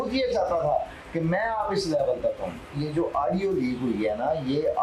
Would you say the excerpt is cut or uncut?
cut